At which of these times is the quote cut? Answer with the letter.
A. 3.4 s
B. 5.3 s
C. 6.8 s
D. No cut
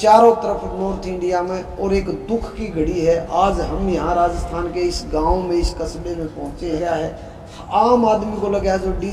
C